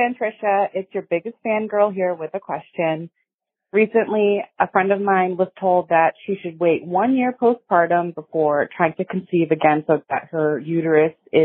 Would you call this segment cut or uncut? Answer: uncut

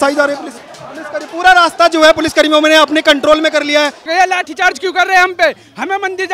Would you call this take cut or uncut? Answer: cut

